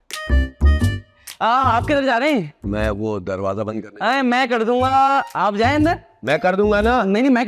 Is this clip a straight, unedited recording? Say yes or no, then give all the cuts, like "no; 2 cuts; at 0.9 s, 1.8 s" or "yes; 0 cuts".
yes; 0 cuts